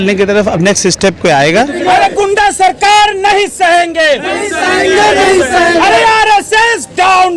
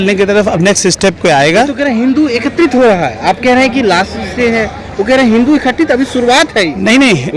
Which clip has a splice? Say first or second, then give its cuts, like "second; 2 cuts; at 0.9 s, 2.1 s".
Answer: first; 1 cut; at 1.8 s